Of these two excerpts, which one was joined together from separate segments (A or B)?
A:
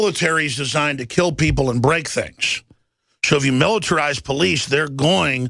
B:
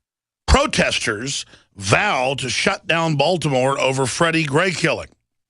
B